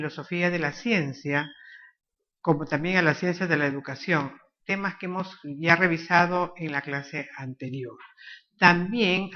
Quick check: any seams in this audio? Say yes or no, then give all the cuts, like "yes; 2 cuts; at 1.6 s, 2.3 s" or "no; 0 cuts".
no; 0 cuts